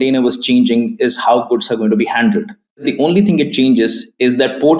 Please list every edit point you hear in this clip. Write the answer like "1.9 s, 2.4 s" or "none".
2.9 s

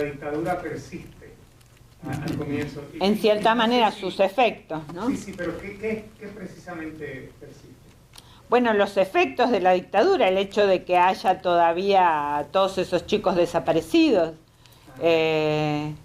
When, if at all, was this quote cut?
6.2 s

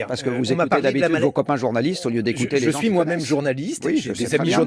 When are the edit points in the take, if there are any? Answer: none

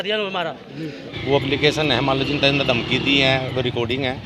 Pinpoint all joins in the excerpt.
1.1 s

